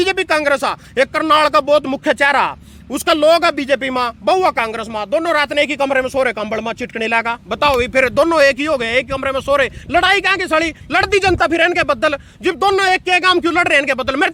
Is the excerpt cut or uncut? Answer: uncut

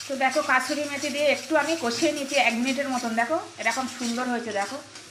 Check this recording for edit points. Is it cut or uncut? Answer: uncut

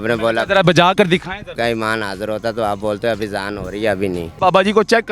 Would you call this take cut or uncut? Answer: cut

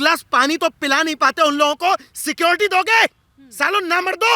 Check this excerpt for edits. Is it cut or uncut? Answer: uncut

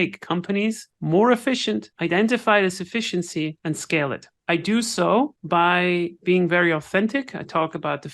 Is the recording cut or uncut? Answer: cut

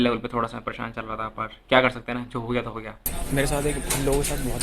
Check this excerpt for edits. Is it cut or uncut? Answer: cut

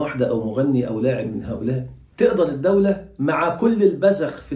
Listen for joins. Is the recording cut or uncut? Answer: uncut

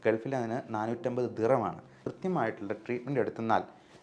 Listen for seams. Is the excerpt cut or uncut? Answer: cut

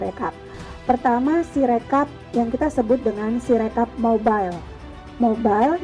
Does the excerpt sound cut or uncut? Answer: uncut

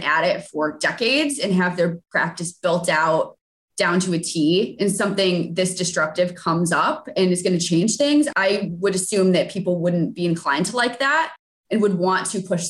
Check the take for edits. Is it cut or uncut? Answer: uncut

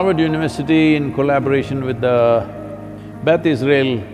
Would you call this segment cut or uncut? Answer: uncut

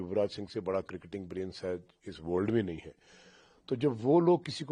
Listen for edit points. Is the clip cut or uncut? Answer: uncut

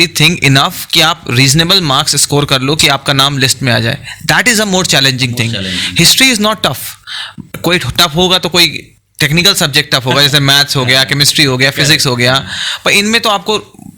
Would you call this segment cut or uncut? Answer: uncut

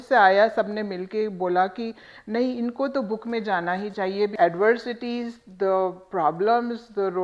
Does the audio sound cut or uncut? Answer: cut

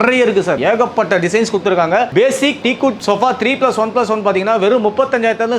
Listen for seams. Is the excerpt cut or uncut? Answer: uncut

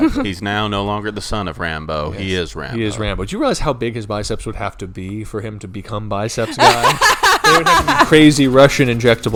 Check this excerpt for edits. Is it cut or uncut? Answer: uncut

